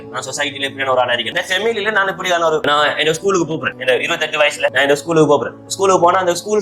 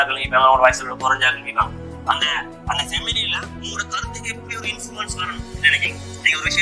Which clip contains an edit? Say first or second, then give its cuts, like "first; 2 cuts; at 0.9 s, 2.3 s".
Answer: first; 4 cuts; at 1.3 s, 2.7 s, 3.7 s, 4.7 s